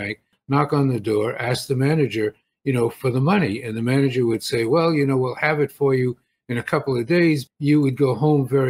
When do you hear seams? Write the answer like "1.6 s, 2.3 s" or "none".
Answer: 7.5 s